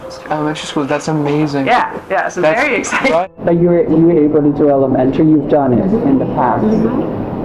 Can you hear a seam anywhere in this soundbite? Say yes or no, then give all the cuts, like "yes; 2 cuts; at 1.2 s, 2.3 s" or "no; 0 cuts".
yes; 1 cut; at 3.3 s